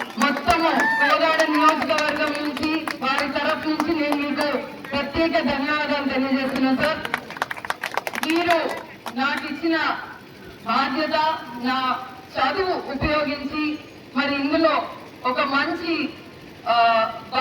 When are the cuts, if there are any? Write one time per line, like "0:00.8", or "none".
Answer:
0:05.1